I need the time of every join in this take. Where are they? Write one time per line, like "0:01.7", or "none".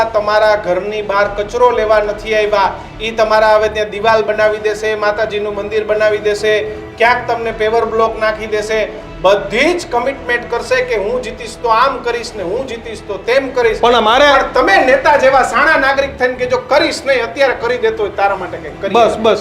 none